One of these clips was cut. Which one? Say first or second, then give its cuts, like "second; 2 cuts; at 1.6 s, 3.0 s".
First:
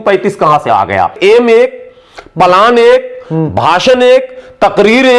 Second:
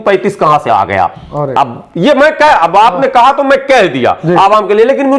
first; 1 cut; at 1.2 s